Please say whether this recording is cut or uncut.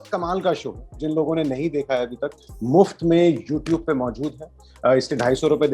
cut